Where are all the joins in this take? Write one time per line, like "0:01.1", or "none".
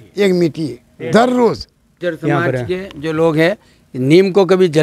0:01.9